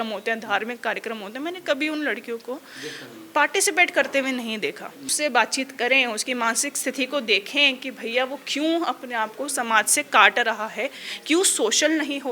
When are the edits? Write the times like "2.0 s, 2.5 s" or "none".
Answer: 5.0 s